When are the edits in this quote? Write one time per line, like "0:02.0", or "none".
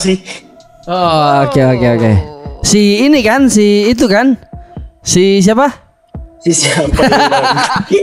none